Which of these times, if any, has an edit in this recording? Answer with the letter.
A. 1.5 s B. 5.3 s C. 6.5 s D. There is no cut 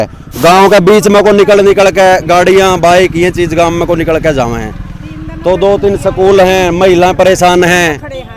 D